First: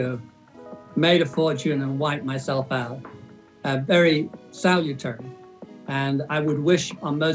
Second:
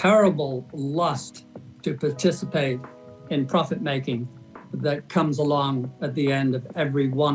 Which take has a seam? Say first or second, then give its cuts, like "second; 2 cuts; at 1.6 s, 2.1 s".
first; 1 cut; at 6.3 s